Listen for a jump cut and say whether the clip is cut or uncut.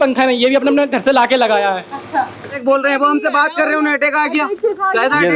cut